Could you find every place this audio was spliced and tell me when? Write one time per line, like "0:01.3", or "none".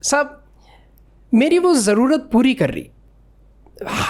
none